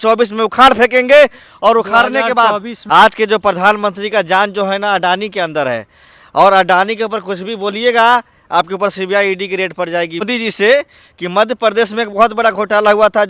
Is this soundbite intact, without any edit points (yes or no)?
no